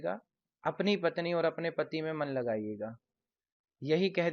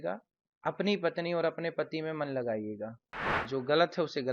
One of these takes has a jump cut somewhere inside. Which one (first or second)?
second